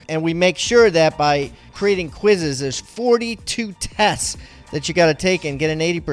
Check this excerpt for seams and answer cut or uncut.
uncut